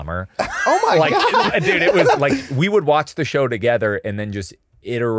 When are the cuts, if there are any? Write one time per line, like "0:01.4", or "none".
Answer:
0:02.2